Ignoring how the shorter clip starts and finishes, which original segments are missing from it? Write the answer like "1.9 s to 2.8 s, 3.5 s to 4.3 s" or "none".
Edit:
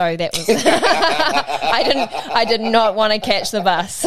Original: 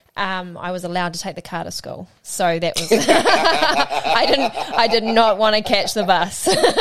none